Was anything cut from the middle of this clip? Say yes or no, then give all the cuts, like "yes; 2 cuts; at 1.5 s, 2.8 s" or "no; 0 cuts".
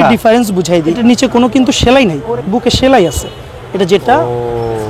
yes; 2 cuts; at 0.9 s, 2.2 s